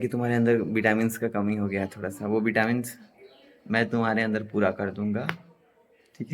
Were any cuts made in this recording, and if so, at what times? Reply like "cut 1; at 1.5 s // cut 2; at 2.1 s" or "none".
none